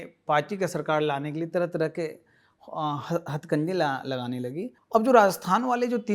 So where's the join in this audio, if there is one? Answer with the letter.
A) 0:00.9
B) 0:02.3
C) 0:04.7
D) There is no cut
C